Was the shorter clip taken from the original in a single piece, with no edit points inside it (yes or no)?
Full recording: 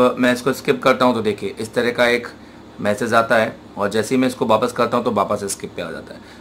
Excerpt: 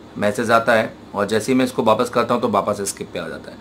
yes